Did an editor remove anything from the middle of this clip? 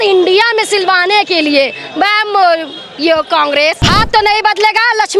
yes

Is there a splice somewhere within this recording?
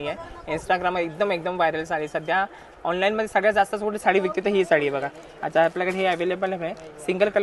no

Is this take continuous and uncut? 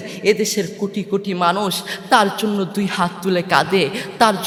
yes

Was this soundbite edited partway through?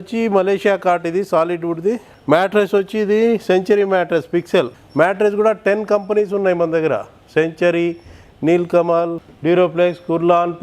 yes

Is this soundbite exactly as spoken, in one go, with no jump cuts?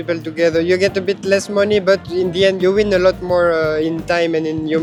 yes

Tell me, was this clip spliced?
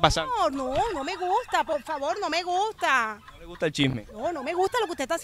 no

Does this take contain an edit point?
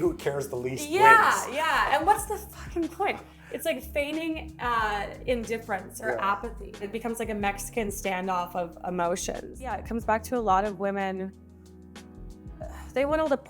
yes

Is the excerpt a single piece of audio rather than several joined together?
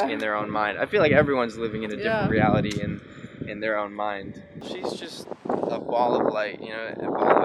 no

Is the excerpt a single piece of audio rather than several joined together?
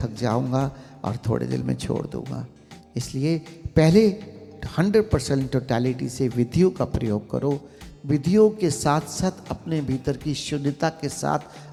yes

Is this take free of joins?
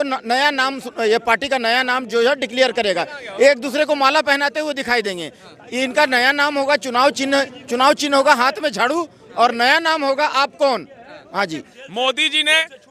no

